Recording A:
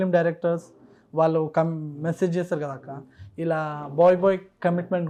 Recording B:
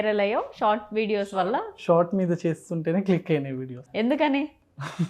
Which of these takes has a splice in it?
B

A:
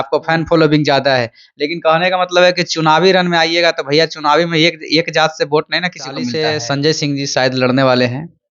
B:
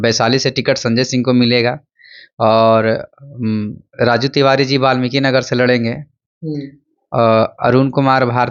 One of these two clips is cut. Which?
A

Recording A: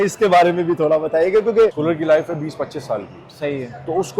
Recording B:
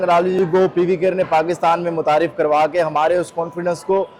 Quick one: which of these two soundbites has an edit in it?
A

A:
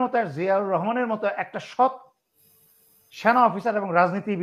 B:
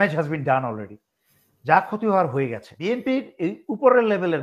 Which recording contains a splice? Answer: B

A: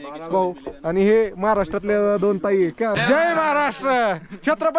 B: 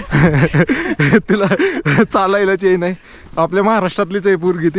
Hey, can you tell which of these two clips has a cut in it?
A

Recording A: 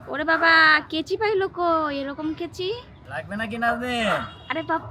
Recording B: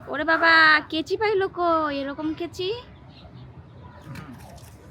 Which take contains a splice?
A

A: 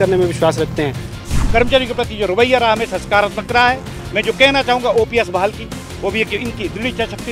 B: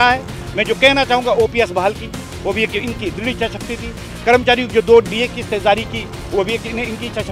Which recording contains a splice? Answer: A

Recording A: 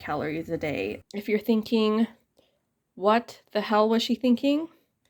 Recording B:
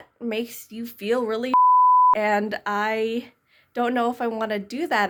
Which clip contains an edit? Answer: A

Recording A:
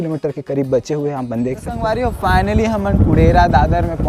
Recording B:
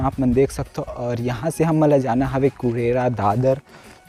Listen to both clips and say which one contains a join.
A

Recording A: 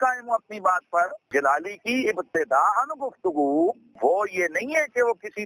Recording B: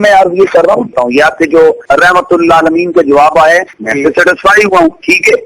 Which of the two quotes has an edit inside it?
B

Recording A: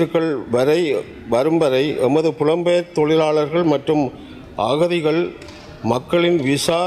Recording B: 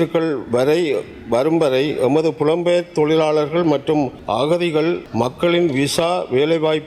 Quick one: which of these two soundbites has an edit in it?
B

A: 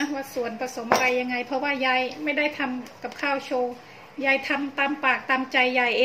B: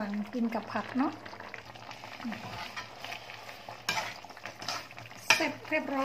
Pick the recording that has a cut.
B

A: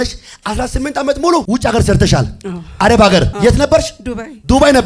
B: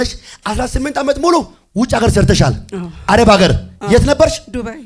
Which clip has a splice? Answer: A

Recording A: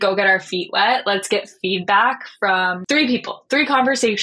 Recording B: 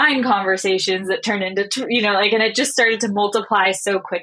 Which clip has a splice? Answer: A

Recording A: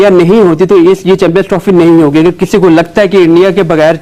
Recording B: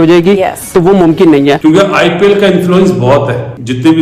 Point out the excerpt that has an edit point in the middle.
B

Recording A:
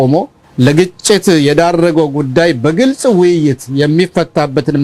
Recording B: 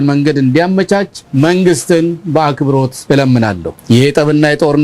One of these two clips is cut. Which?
B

